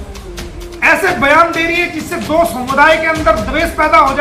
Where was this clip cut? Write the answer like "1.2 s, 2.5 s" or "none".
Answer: none

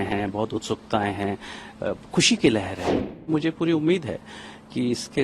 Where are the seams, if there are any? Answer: 3.3 s

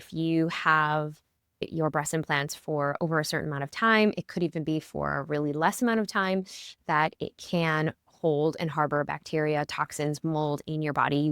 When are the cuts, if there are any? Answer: 1.6 s

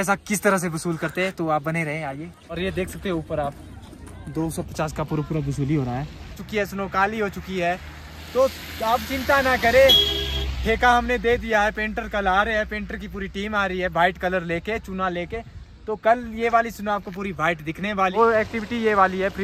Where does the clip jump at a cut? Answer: 2.6 s, 6.4 s, 18.1 s

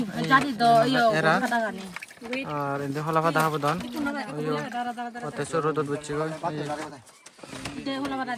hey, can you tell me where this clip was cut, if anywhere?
none

